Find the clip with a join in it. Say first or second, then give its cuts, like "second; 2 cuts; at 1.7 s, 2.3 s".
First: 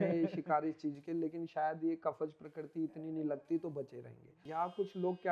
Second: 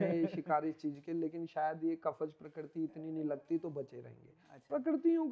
first; 1 cut; at 4.4 s